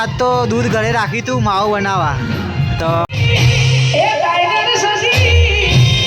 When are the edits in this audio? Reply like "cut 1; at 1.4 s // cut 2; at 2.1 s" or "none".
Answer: cut 1; at 3.1 s